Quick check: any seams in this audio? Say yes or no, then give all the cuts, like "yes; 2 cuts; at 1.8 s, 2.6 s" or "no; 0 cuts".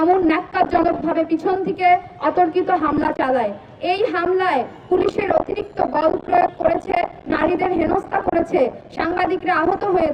no; 0 cuts